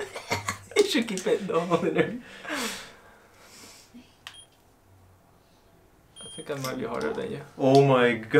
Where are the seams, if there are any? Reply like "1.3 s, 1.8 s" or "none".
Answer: none